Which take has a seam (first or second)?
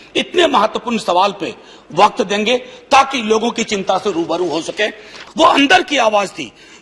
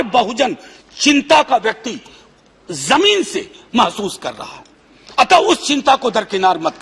first